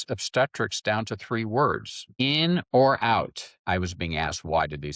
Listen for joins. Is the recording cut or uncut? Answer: cut